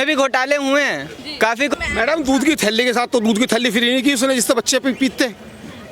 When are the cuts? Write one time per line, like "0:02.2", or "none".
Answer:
0:01.7

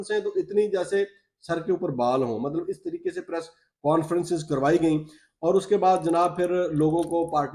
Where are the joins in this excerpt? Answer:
none

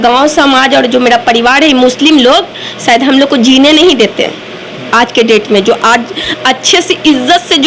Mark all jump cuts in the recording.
none

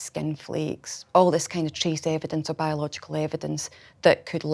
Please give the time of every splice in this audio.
0:00.9

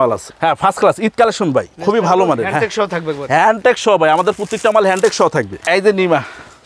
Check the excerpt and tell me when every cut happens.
0:01.7
0:05.6

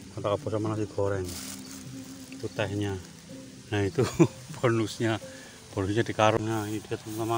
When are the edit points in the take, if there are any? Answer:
0:06.4

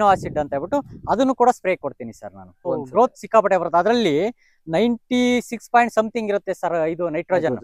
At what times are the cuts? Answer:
0:02.7

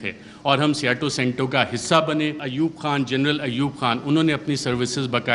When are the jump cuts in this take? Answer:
0:02.4

